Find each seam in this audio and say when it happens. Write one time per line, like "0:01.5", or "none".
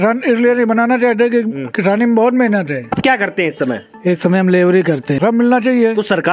0:03.0
0:05.2